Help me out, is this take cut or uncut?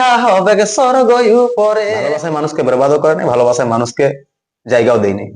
cut